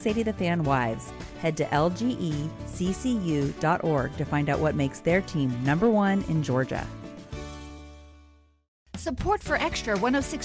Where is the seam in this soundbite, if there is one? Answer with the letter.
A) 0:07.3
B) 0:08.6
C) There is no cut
B